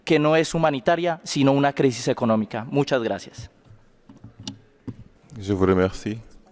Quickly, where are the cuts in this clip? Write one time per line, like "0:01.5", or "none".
none